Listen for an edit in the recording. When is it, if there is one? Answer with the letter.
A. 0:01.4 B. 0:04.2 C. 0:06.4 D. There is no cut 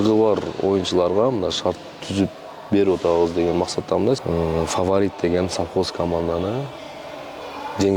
B